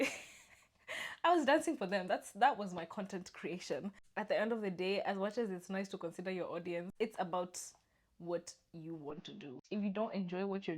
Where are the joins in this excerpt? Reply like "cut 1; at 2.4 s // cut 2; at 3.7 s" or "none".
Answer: cut 1; at 4.0 s // cut 2; at 6.9 s // cut 3; at 9.6 s